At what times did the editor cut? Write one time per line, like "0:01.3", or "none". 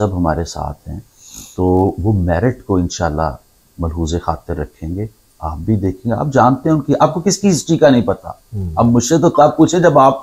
none